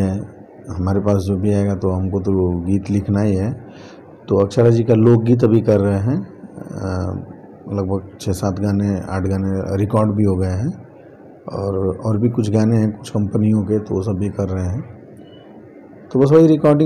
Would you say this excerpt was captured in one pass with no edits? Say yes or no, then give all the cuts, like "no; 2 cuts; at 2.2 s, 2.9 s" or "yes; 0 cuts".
yes; 0 cuts